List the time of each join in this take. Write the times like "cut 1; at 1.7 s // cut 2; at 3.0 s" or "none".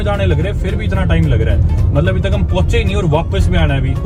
none